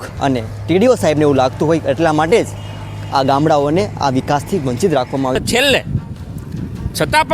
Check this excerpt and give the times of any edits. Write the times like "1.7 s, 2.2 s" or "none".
5.4 s